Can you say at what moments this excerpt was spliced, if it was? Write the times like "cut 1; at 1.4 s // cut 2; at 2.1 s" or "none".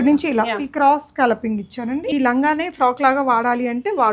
cut 1; at 2.1 s